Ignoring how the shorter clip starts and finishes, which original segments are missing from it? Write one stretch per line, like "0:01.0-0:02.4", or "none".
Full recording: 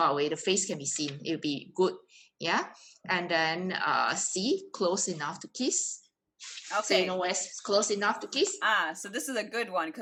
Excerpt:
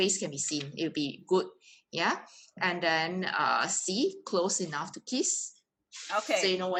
none